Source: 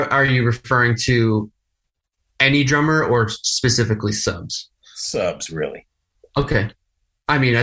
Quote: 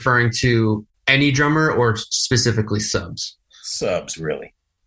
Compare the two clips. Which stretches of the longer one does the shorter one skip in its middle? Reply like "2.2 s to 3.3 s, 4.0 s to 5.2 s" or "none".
1.6 s to 2.3 s

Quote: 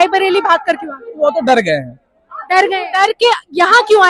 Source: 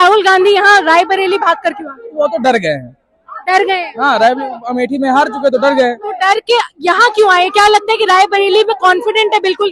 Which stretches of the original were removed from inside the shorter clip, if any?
3.8 s to 6.1 s

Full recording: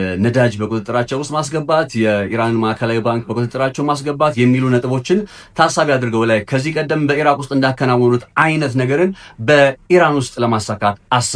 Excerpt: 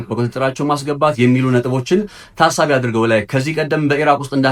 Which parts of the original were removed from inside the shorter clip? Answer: none

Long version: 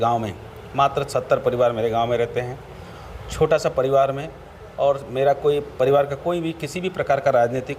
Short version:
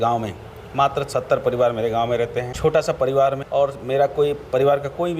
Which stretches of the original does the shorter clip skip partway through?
2.5 s to 3.3 s, 4.2 s to 4.7 s

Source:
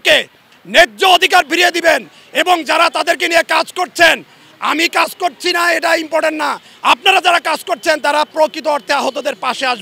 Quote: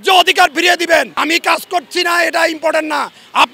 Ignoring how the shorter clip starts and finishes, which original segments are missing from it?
2.1 s to 4.6 s

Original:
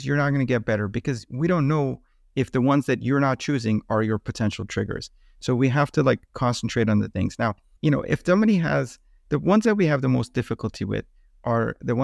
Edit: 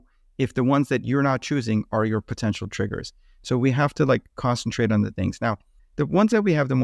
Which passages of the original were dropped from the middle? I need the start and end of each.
7.7 s to 9.0 s

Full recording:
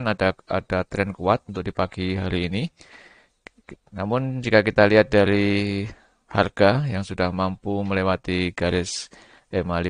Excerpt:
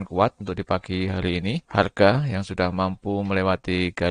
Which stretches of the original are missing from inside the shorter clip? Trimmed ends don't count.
2.7 s to 6.2 s

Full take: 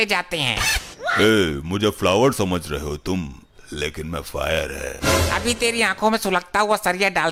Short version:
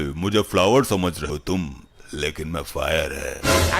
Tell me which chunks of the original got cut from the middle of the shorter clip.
2.7 s to 2.8 s

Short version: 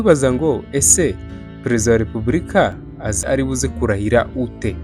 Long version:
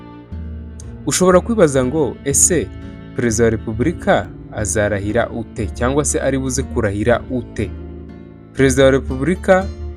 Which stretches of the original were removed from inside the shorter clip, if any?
4.8 s to 6.2 s

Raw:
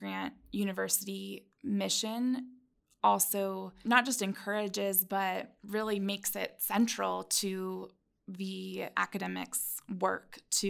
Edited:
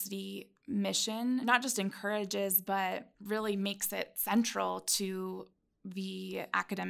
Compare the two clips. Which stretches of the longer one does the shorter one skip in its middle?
2.4 s to 3.9 s

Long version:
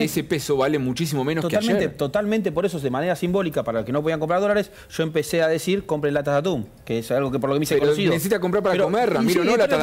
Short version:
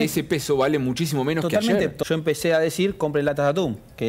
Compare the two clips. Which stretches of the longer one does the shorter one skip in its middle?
2.0 s to 4.9 s

